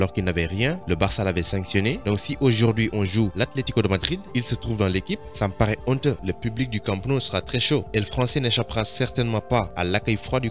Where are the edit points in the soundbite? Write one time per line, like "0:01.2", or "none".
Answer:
0:06.2